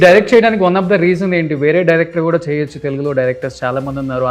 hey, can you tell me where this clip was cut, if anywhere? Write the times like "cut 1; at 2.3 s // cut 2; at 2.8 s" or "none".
none